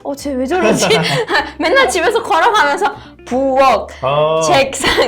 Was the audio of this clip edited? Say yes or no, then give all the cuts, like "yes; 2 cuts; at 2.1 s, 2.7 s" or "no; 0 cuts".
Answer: no; 0 cuts